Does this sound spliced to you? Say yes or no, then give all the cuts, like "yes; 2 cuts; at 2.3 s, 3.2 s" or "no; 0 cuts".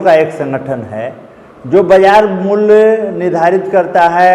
no; 0 cuts